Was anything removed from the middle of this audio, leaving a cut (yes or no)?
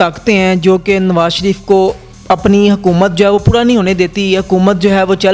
yes